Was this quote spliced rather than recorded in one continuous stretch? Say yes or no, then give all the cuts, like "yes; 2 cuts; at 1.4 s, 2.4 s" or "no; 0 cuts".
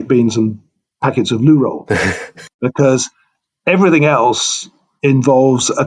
no; 0 cuts